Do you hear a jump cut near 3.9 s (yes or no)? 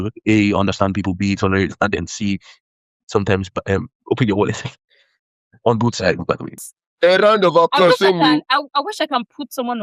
no